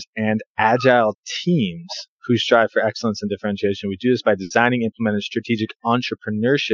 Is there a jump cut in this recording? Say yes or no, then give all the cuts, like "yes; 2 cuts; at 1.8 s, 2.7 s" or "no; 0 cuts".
no; 0 cuts